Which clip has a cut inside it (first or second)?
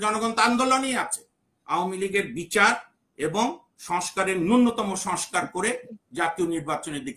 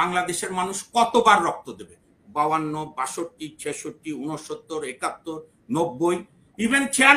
first